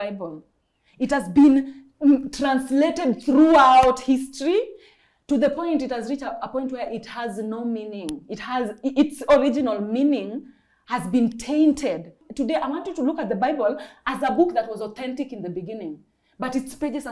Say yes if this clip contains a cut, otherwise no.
yes